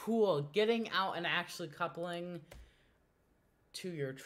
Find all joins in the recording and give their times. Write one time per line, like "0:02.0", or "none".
none